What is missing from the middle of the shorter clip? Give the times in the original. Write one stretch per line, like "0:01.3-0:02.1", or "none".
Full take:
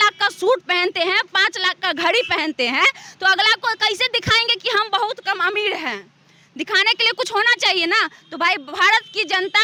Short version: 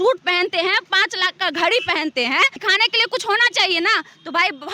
0:03.0-0:06.6